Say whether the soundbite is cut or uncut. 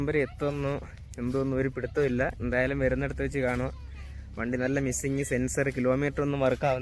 uncut